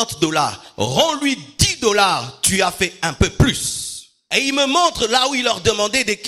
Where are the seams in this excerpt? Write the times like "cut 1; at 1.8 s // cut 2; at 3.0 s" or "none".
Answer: cut 1; at 4.2 s